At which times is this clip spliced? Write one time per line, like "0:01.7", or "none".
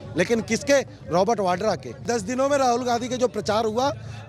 0:02.1